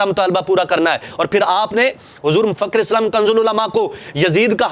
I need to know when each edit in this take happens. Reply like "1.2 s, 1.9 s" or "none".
none